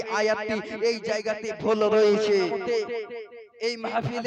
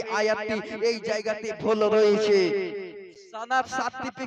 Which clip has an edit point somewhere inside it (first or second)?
first